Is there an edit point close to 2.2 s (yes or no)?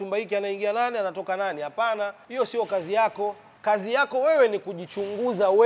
yes